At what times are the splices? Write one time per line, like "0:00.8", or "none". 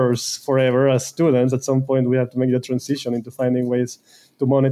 none